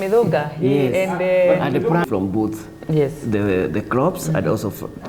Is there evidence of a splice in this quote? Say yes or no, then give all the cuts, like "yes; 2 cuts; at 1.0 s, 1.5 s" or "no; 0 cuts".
yes; 1 cut; at 2.0 s